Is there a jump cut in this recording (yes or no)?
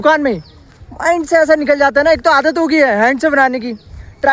no